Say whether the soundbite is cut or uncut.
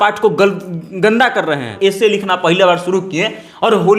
cut